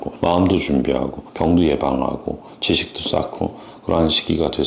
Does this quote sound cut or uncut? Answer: uncut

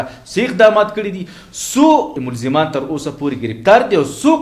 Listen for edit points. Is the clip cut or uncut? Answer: cut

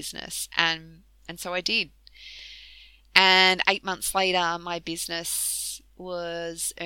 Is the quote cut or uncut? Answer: uncut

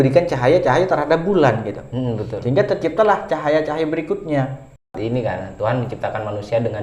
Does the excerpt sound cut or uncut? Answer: cut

